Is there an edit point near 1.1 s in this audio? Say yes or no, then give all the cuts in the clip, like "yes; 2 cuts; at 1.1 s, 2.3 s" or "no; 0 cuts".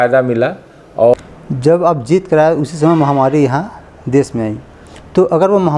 yes; 1 cut; at 1.1 s